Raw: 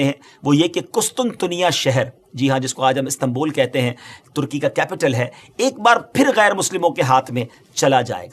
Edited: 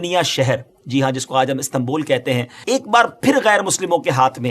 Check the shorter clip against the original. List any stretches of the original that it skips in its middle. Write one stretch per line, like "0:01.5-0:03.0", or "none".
0:04.0-0:05.4

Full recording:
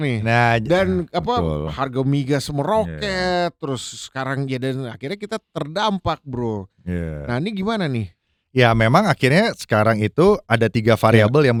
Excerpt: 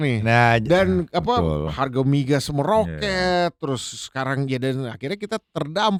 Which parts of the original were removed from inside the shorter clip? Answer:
none

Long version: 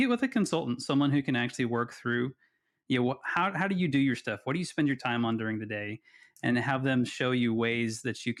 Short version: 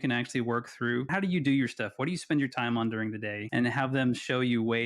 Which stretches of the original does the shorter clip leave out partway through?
0:02.3-0:03.6
0:05.8-0:06.3

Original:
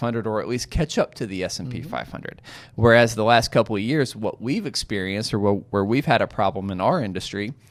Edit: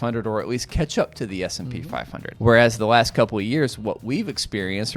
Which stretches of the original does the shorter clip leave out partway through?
0:02.2-0:02.6

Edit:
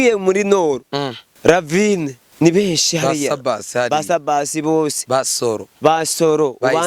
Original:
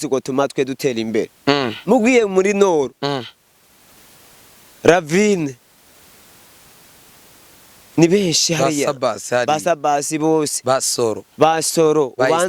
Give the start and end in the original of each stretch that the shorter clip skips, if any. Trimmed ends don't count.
0:03.3-0:04.6
0:05.6-0:07.8

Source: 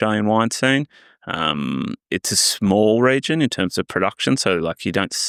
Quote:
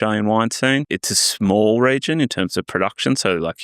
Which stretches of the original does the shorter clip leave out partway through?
0:00.9-0:02.1

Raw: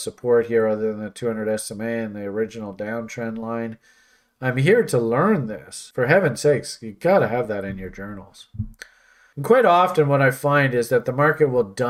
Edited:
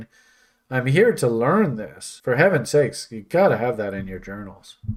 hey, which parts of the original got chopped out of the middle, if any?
none

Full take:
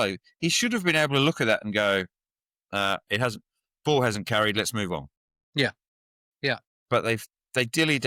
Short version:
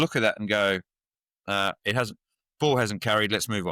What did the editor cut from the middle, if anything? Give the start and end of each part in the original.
none

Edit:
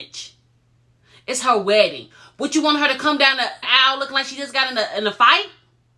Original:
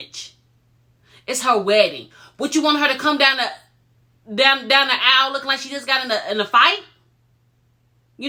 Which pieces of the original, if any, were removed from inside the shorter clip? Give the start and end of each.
0:03.6-0:05.0

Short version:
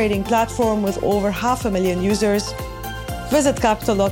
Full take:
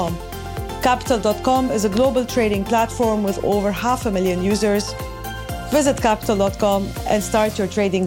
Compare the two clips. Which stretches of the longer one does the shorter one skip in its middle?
none

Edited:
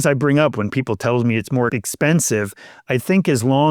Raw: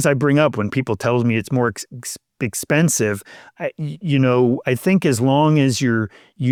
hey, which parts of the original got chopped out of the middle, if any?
0:01.7-0:02.4
0:03.5-0:04.6

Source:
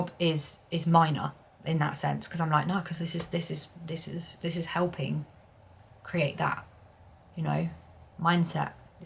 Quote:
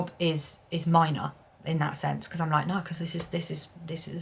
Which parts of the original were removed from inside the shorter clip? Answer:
none

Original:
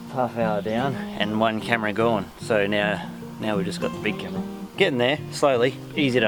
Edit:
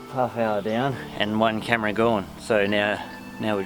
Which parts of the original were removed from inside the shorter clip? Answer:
none

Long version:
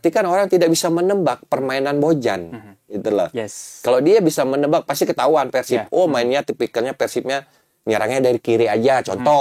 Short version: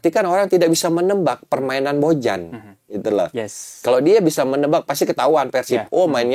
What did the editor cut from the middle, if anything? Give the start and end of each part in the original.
none

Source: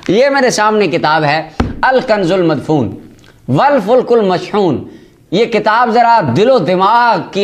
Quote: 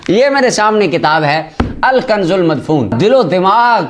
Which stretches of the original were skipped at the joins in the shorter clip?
0:02.9-0:06.3

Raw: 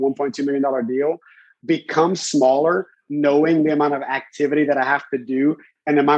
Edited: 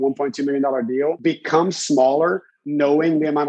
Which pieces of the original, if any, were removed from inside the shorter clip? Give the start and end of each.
0:01.2-0:01.6

